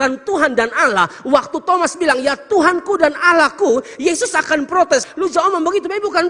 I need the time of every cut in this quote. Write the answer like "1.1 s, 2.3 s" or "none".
none